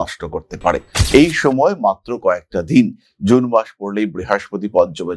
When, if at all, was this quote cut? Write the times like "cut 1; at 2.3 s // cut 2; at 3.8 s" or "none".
cut 1; at 0.9 s